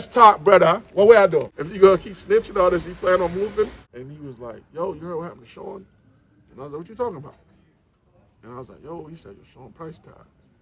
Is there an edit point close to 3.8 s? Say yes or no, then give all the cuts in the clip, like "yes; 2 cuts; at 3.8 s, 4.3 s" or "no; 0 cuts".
yes; 2 cuts; at 1.6 s, 3.8 s